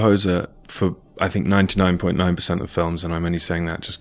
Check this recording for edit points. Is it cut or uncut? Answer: cut